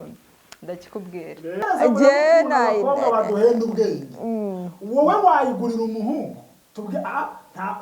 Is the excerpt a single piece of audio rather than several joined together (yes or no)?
no